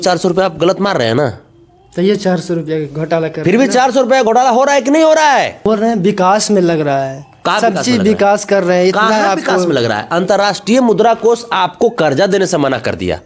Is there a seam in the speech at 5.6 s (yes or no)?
yes